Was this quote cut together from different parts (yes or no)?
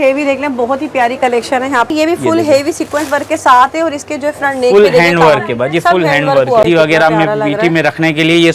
yes